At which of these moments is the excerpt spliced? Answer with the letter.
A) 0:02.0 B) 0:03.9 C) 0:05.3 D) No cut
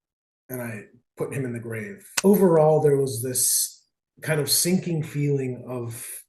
A